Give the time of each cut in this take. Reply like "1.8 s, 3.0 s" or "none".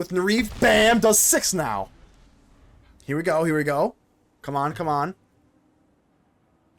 none